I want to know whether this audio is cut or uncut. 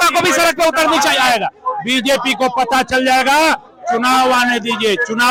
uncut